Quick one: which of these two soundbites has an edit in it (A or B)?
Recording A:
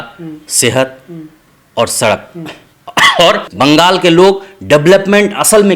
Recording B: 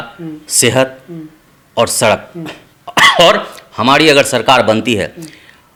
A